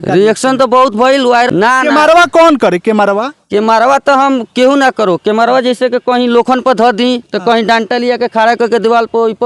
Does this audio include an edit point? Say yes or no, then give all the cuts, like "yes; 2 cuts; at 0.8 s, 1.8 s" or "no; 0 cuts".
yes; 1 cut; at 1.5 s